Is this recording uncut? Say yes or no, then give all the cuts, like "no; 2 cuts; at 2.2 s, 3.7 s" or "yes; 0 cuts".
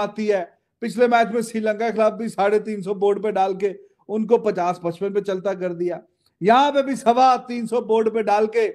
yes; 0 cuts